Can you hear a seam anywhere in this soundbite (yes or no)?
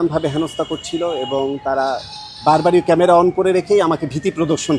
no